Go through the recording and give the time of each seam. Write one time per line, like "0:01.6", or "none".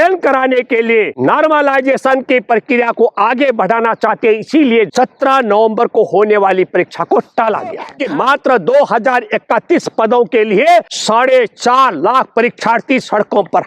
0:01.1
0:04.9
0:07.9
0:11.0